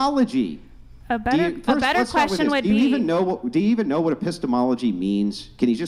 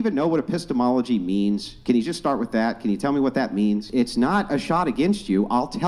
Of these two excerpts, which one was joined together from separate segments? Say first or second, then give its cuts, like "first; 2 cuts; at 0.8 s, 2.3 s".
second; 1 cut; at 3.9 s